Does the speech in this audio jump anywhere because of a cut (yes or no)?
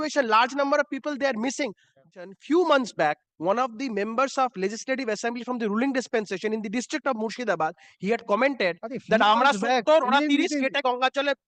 yes